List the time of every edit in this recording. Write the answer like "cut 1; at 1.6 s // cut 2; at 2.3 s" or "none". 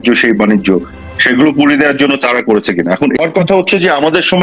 cut 1; at 3.2 s

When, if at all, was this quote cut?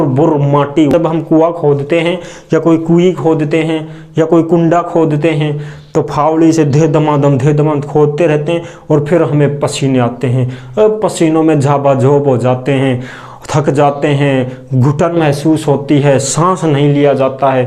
cut 1; at 0.9 s

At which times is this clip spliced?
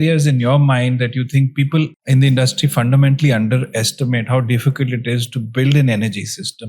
cut 1; at 2.0 s

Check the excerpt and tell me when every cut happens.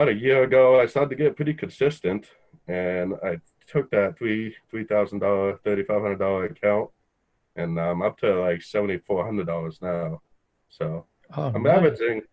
none

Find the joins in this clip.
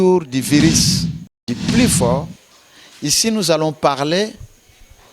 cut 1; at 1.4 s

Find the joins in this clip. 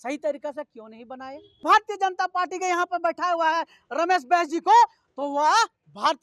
cut 1; at 1.6 s

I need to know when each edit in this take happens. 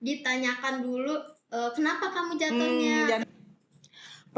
cut 1; at 3.2 s

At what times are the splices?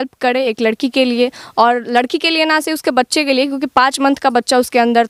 none

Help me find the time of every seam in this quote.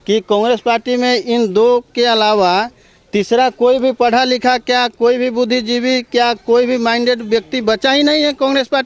none

